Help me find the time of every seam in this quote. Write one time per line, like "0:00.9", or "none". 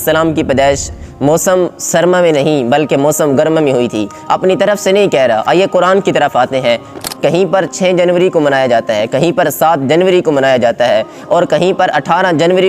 0:06.9